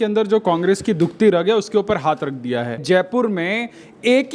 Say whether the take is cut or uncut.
cut